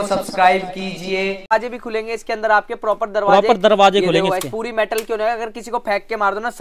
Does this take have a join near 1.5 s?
yes; 1 cut; at 1.5 s

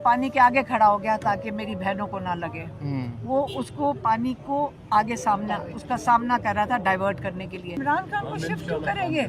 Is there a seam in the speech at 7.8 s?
yes; 2 cuts; at 4.8 s, 7.8 s

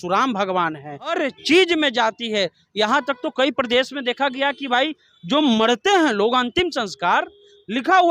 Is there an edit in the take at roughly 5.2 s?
no; 1 cut; at 1.1 s

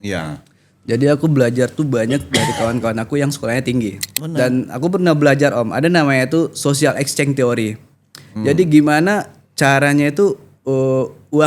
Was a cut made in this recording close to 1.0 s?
no; 1 cut; at 4.1 s

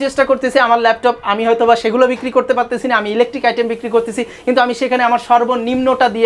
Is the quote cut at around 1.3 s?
no; 0 cuts

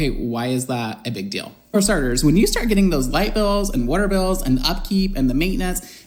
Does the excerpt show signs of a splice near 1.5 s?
no; 0 cuts

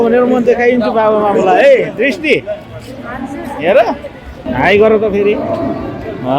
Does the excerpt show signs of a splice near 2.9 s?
no; 1 cut; at 4.4 s

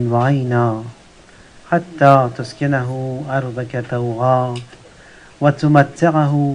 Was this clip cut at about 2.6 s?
no; 0 cuts

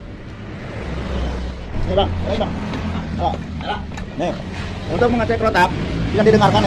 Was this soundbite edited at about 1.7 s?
yes; 1 cut; at 1.7 s

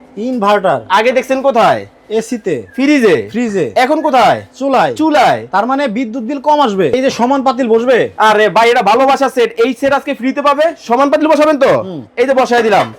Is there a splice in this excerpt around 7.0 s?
yes; 1 cut; at 7.0 s

